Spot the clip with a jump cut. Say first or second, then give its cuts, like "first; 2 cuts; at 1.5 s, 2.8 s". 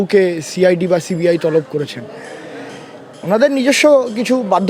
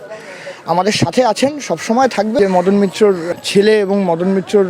second; 2 cuts; at 2.4 s, 3.3 s